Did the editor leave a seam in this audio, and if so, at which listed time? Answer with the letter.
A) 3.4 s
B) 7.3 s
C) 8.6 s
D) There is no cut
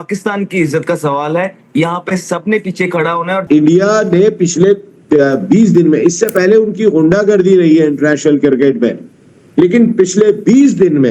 A